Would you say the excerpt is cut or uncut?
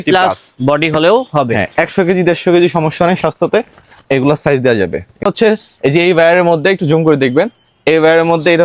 cut